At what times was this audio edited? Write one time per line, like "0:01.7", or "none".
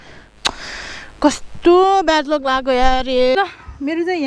0:03.4